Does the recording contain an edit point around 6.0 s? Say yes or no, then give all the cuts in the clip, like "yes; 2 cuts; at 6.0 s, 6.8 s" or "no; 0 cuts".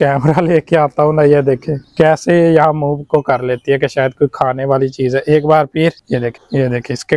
no; 0 cuts